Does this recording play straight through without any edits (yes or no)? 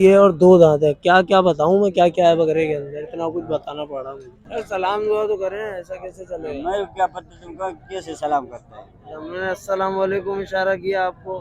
no